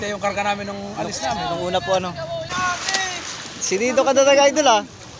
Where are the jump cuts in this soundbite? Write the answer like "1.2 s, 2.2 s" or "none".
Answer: 2.5 s